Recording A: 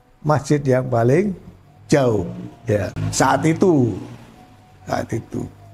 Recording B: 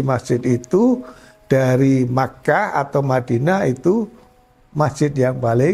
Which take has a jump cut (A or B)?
A